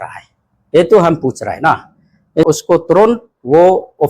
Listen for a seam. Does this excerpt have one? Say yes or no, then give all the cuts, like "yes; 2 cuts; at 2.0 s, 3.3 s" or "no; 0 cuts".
yes; 1 cut; at 2.5 s